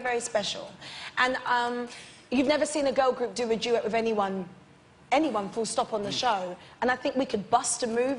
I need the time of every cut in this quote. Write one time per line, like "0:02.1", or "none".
0:02.5